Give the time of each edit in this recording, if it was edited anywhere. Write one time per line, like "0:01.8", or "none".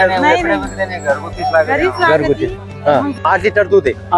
0:03.1